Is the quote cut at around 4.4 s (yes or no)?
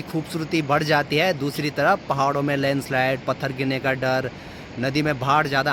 no